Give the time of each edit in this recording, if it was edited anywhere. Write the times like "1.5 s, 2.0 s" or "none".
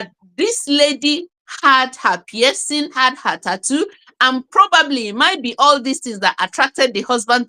2.9 s